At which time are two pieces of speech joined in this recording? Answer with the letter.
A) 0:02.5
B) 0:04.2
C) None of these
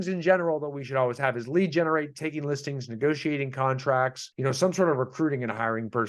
B